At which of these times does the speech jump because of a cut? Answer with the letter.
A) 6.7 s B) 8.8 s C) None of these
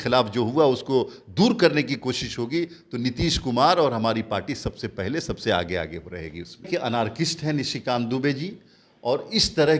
A